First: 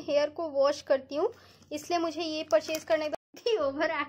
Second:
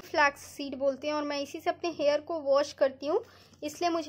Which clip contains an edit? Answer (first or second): first